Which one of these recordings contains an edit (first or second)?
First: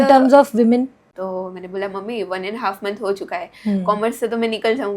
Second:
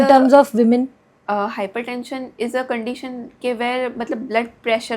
first